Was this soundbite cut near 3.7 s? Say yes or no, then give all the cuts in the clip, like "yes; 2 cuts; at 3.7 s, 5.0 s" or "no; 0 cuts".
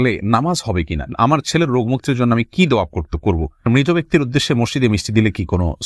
yes; 2 cuts; at 1.1 s, 3.7 s